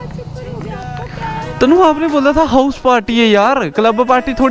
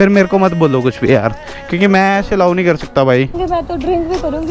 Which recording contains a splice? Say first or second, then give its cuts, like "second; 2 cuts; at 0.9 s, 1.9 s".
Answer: second; 1 cut; at 3.4 s